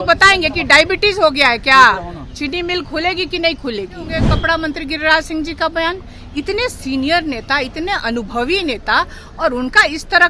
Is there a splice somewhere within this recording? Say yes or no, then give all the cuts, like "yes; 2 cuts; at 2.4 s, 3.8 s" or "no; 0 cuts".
yes; 1 cut; at 4.3 s